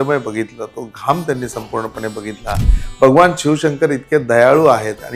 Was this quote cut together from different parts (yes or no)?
yes